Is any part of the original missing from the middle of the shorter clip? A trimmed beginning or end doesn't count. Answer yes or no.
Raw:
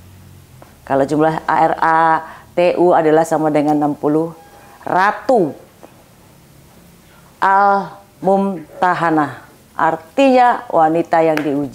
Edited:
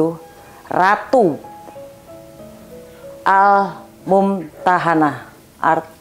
no